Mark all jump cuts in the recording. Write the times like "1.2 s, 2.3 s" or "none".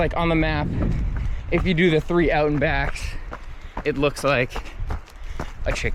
none